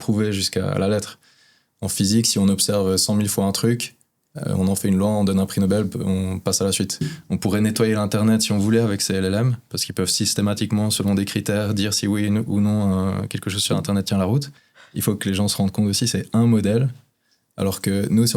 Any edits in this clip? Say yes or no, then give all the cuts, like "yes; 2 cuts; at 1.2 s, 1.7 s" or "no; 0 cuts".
yes; 2 cuts; at 7.1 s, 14.5 s